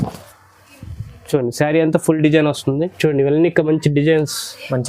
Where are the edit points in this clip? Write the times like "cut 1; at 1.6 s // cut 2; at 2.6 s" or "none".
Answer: cut 1; at 2.9 s